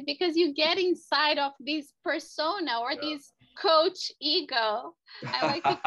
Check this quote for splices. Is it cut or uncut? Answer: cut